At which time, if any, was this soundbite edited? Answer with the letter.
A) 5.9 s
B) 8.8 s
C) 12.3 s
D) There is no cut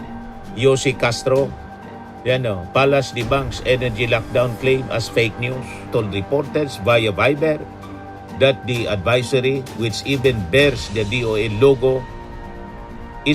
A